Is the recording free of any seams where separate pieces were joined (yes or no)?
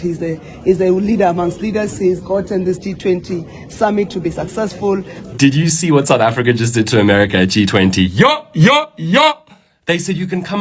no